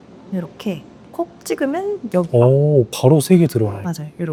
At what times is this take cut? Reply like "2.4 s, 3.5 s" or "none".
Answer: none